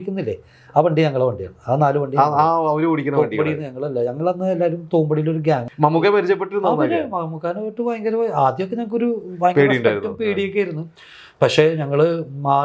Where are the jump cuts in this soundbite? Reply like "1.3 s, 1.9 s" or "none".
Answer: 5.6 s